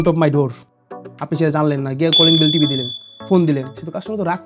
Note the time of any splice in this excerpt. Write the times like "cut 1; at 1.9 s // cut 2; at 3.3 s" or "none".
none